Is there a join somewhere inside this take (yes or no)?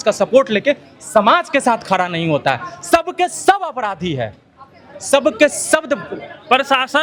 no